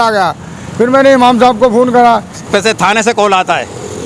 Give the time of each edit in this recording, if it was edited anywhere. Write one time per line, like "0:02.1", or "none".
0:02.3